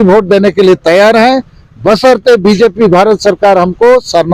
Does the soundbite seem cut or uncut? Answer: uncut